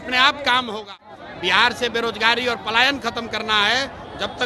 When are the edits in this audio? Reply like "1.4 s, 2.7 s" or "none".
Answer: 1.1 s

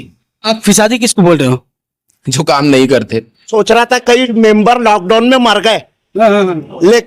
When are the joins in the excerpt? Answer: 3.5 s

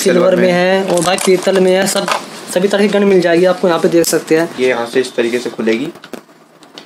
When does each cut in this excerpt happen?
4.6 s

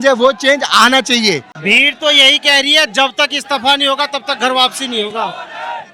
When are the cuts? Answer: 1.5 s

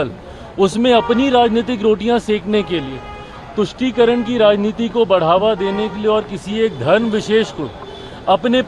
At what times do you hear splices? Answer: none

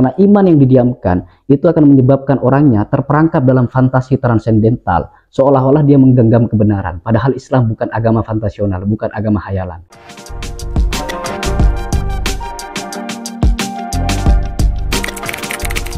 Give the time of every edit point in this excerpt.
9.9 s

